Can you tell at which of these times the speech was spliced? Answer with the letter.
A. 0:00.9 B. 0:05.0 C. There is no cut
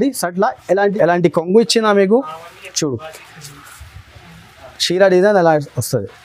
A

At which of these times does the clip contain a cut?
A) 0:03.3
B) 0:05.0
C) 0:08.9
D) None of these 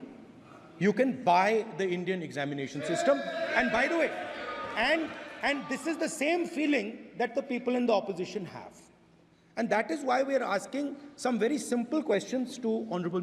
D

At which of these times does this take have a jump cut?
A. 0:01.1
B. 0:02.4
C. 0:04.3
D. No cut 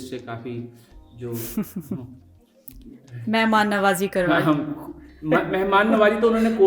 D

